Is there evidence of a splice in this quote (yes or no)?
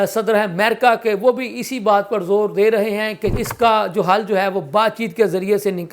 yes